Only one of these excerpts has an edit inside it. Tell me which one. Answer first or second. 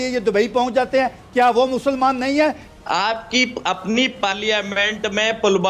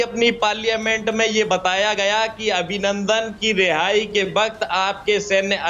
first